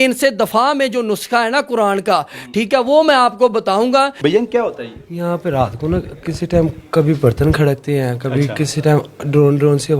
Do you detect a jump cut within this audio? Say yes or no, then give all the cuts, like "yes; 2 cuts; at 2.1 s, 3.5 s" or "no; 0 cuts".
yes; 1 cut; at 4.1 s